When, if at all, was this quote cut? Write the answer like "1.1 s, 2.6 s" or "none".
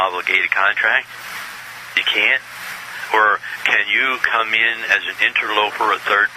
5.1 s